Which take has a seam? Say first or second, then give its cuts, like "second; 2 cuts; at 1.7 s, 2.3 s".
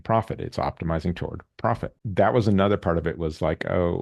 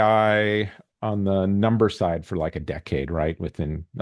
first; 1 cut; at 2.0 s